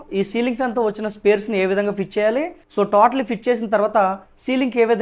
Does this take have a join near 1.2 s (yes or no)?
no